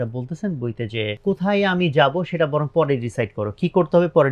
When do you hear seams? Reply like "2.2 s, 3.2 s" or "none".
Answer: 1.2 s